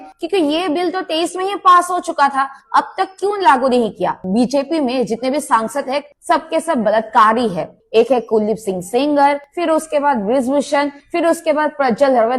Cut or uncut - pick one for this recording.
cut